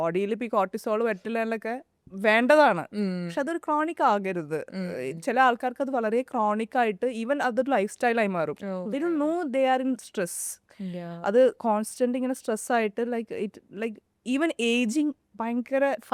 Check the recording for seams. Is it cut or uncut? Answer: uncut